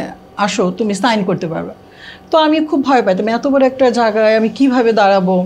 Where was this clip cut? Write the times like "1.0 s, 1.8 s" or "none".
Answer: none

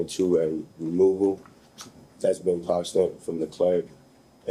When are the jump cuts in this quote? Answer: none

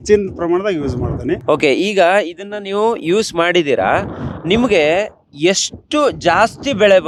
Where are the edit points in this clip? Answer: none

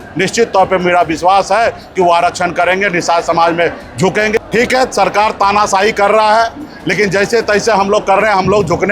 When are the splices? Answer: 4.3 s

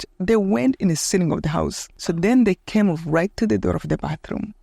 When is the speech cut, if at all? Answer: 1.9 s

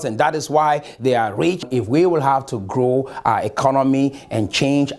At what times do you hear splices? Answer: 1.7 s

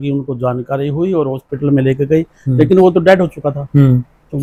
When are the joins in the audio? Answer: none

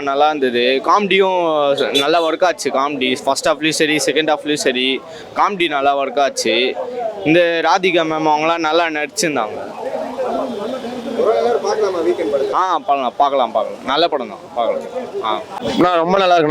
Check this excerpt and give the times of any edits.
none

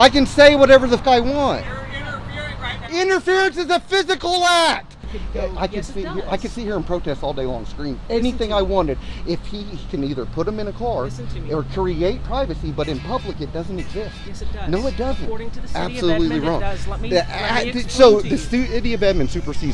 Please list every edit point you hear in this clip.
1.0 s, 5.1 s

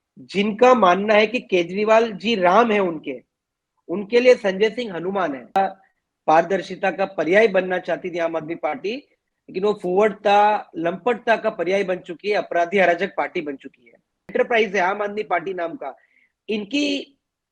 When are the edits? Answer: 5.6 s, 14.3 s

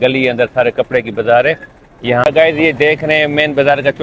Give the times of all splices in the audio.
2.2 s

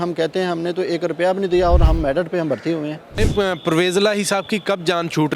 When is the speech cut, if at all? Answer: 3.2 s

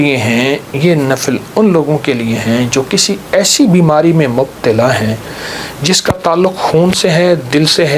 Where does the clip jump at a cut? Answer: none

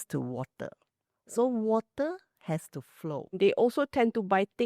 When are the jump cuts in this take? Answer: 3.3 s

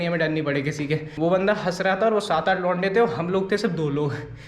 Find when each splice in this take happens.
1.1 s

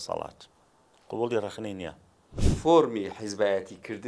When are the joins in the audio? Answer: 2.5 s

